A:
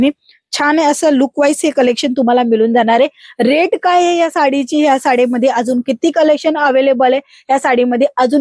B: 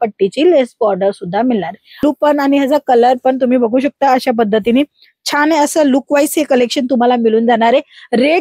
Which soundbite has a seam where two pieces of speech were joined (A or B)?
B